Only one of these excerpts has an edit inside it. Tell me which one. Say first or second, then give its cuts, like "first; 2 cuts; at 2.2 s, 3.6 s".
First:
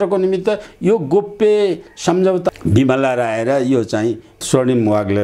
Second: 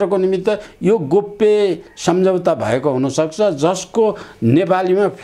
first; 1 cut; at 2.5 s